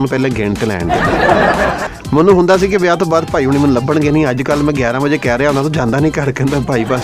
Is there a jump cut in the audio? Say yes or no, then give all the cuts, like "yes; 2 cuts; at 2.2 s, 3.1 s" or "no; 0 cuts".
yes; 1 cut; at 1.9 s